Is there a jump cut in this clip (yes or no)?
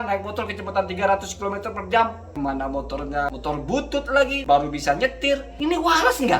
yes